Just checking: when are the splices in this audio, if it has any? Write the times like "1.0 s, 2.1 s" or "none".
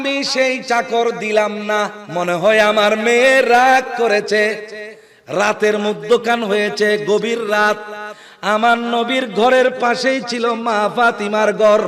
2.0 s